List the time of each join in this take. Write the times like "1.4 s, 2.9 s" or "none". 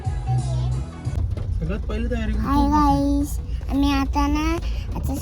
1.1 s